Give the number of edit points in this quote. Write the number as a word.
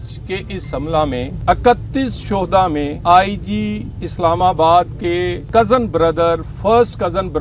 three